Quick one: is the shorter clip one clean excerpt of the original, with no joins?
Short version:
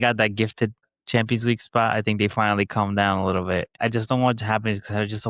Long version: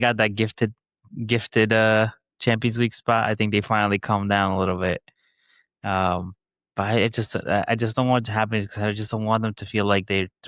no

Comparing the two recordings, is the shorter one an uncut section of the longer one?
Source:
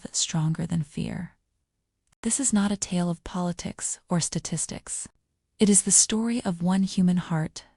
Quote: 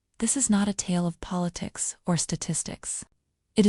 yes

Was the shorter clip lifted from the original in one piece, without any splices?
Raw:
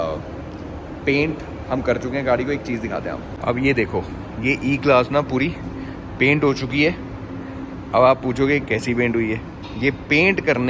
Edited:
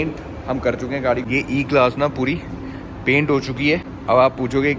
no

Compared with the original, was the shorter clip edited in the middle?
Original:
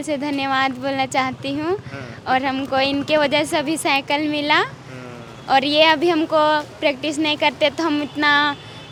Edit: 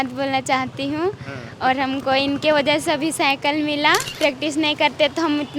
yes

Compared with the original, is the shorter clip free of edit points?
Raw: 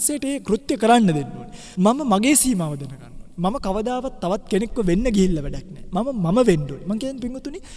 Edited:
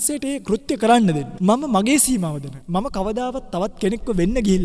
no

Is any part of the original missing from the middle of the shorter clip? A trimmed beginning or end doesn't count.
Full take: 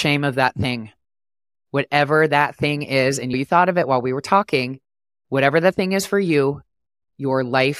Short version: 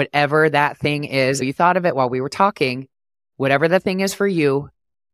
yes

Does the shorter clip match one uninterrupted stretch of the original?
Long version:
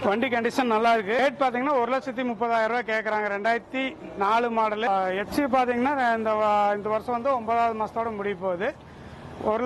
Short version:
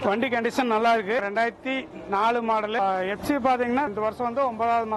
no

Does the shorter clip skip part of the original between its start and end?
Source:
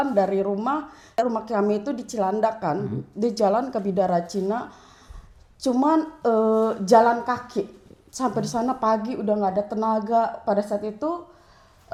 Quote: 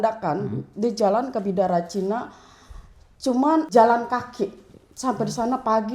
yes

